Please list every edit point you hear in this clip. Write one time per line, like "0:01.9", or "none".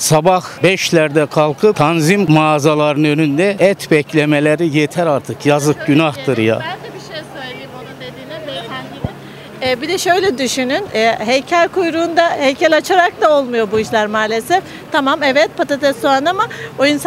none